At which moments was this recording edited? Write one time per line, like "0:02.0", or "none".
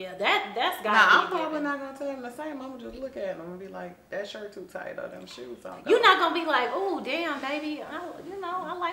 none